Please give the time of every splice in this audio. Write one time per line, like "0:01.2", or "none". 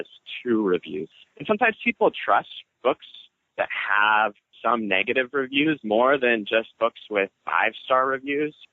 0:01.1
0:02.6
0:07.4